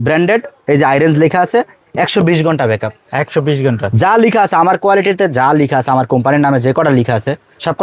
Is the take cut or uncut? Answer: uncut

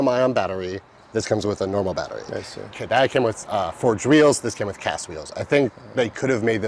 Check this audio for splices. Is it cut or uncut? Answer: uncut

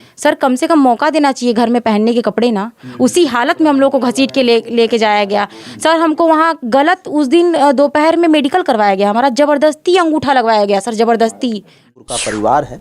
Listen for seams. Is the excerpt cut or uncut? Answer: cut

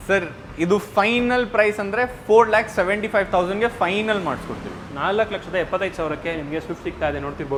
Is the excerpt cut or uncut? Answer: uncut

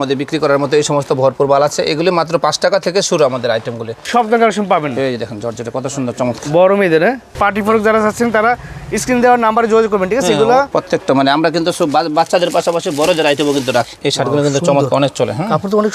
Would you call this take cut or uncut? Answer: cut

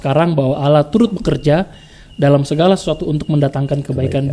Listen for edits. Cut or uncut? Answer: uncut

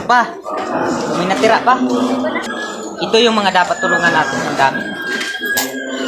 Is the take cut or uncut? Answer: cut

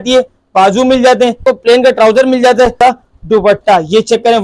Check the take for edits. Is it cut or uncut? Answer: cut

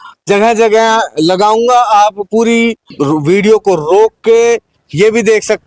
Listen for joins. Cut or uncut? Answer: cut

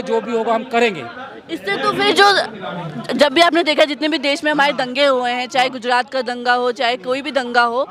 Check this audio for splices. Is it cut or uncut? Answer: uncut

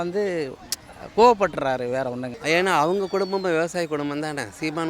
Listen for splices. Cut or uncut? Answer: cut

